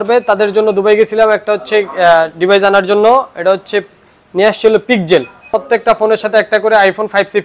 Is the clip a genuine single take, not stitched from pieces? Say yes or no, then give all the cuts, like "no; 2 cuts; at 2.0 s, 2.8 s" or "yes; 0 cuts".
no; 1 cut; at 5.5 s